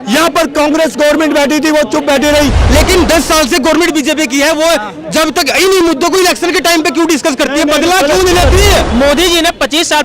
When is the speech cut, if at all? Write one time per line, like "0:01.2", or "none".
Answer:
0:02.6
0:08.9